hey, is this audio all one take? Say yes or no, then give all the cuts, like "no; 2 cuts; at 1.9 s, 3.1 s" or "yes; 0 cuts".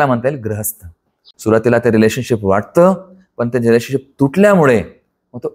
no; 1 cut; at 1.3 s